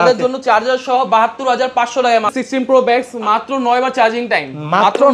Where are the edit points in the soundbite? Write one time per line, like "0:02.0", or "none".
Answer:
0:02.3